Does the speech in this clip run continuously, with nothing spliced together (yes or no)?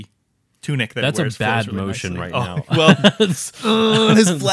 yes